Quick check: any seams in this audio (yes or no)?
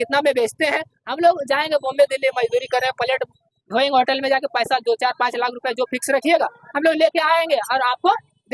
no